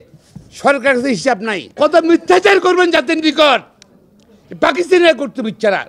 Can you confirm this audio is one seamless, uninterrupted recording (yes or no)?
no